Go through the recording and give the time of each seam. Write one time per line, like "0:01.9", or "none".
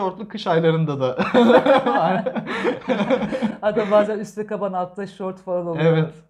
none

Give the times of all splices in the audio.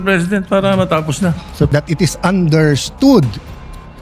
0:01.7

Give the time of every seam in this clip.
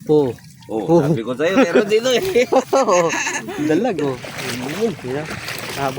0:04.3

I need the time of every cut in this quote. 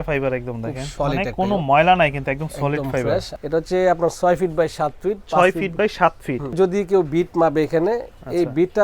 0:00.9
0:03.3
0:06.6

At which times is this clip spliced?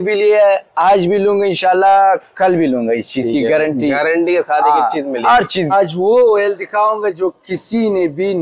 0:05.7

